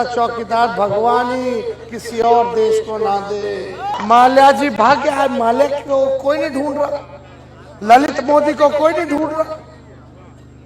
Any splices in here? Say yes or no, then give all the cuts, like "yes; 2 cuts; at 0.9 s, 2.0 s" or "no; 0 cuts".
yes; 1 cut; at 4.0 s